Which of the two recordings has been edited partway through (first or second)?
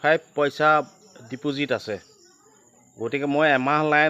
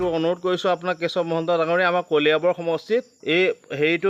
second